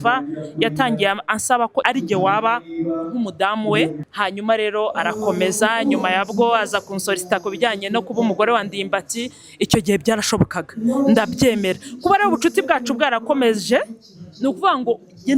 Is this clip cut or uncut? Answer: cut